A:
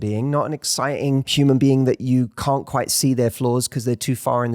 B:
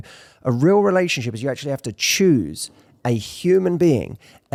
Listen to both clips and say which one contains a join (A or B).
A